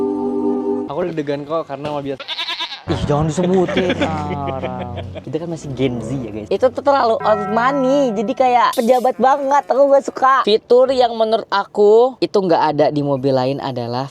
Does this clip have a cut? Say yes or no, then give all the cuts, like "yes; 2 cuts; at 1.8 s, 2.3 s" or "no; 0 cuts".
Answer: yes; 3 cuts; at 0.9 s, 5.2 s, 10.4 s